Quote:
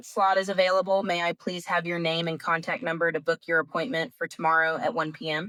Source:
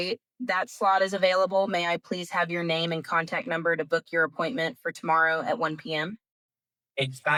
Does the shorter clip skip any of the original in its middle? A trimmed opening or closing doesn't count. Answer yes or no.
no